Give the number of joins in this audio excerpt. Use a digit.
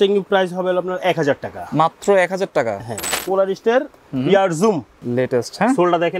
2